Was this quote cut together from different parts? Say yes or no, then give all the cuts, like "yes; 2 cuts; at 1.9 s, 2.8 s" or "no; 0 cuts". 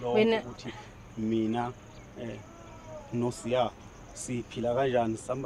no; 0 cuts